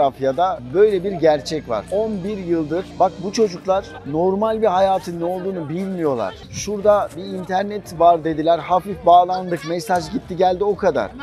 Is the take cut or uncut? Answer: uncut